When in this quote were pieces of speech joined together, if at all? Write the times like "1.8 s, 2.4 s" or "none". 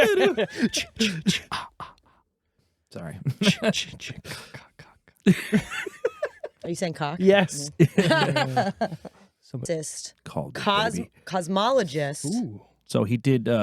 9.6 s